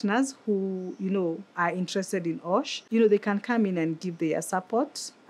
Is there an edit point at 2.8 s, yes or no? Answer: yes